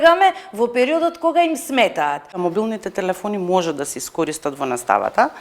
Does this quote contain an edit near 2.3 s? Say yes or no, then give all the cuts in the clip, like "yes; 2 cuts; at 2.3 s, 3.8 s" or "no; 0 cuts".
yes; 1 cut; at 2.3 s